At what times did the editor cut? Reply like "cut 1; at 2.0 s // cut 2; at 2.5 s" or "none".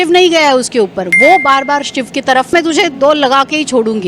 cut 1; at 2.5 s